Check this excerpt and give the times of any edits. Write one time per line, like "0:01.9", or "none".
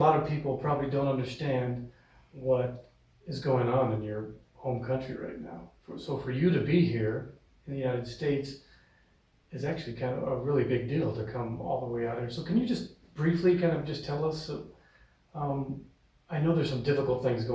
none